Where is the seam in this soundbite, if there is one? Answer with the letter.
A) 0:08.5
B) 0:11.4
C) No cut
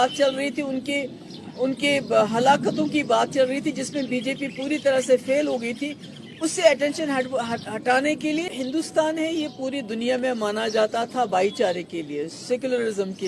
A